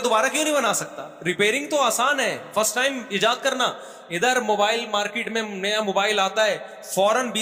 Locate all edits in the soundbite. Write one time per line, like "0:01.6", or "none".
none